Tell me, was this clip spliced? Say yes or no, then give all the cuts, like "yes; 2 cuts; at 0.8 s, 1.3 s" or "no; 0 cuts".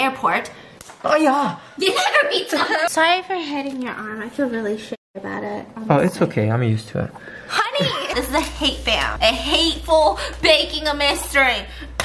yes; 2 cuts; at 2.9 s, 8.1 s